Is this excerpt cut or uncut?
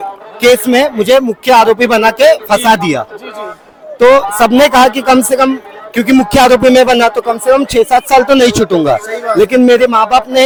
uncut